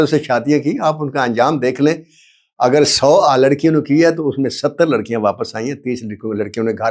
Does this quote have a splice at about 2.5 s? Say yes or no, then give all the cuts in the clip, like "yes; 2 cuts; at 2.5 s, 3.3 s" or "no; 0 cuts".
no; 0 cuts